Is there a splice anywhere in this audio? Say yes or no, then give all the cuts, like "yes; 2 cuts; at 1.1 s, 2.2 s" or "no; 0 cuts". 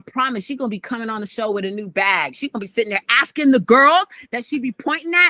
no; 0 cuts